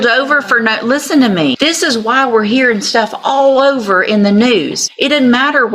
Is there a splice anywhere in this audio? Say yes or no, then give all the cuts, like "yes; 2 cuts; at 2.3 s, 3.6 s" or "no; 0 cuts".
yes; 2 cuts; at 1.6 s, 4.8 s